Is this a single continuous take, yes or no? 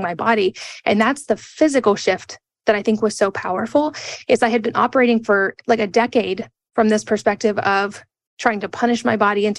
yes